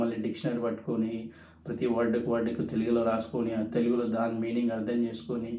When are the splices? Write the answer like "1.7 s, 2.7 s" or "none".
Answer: none